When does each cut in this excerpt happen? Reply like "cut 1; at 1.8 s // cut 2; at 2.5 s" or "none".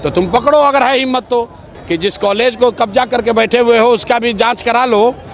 cut 1; at 1.6 s